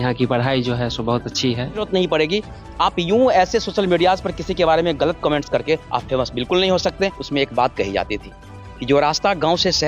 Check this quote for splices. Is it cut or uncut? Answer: cut